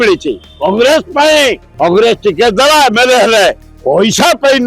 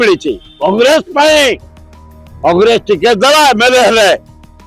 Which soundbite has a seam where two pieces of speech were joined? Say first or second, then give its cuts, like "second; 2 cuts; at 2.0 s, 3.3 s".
first; 2 cuts; at 1.7 s, 3.7 s